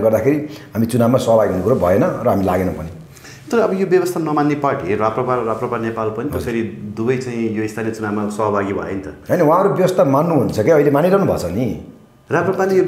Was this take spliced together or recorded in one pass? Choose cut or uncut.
uncut